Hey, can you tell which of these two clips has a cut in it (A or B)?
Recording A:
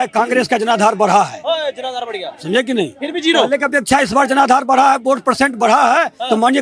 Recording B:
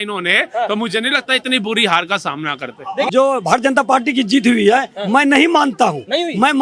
B